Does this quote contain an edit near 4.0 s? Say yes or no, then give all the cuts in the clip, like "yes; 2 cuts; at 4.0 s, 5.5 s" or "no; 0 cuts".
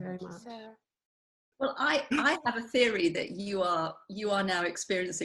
no; 1 cut; at 1.2 s